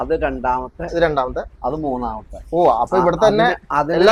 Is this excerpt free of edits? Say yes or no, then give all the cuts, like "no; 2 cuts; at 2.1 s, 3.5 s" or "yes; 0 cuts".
yes; 0 cuts